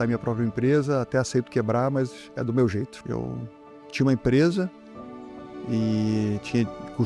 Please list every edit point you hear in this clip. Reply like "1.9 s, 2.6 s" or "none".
3.0 s